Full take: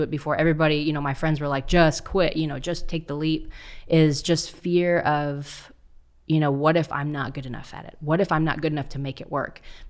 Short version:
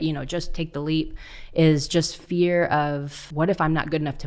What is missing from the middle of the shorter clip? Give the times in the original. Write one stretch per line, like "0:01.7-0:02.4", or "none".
0:05.5-0:07.9